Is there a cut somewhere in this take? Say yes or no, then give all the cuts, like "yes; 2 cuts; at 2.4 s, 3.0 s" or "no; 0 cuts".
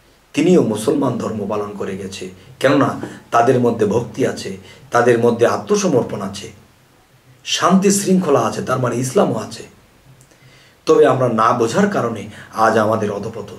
no; 0 cuts